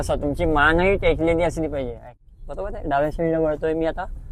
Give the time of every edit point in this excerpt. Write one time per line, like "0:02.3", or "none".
0:02.1